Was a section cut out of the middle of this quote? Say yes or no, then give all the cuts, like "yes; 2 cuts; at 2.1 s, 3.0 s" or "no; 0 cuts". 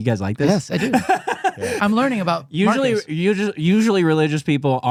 no; 0 cuts